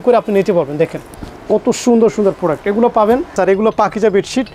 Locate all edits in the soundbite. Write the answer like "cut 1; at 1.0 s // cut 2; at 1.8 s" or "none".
cut 1; at 3.3 s